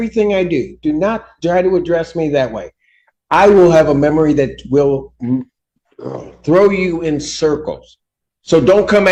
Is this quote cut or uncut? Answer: uncut